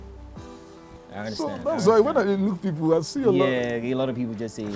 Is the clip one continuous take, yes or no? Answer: yes